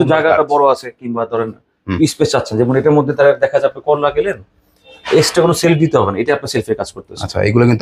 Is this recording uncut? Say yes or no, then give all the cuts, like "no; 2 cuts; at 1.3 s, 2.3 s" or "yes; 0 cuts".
yes; 0 cuts